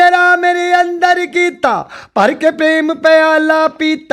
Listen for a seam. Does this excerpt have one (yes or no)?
no